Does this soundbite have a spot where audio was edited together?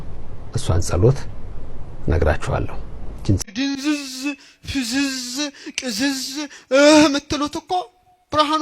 yes; 1 cut; at 3.4 s

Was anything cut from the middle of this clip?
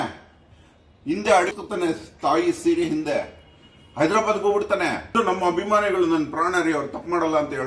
yes; 2 cuts; at 1.5 s, 5.2 s

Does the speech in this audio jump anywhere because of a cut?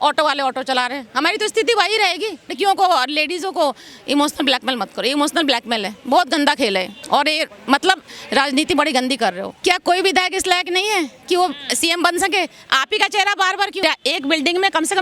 yes; 4 cuts; at 2.5 s, 7.0 s, 9.5 s, 13.8 s

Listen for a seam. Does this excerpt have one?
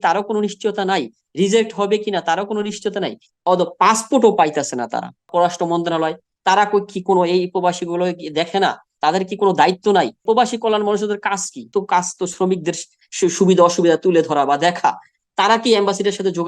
yes; 3 cuts; at 5.2 s, 10.2 s, 11.7 s

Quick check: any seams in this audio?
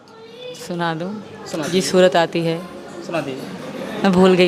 no; 0 cuts

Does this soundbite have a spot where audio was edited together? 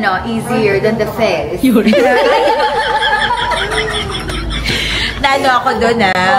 no; 0 cuts

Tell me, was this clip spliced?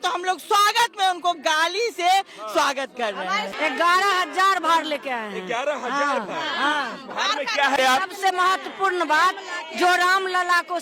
yes; 2 cuts; at 3.5 s, 7.8 s

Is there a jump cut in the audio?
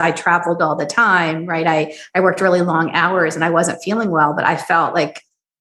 no; 0 cuts

